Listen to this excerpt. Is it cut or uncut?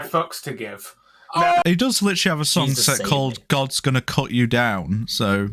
cut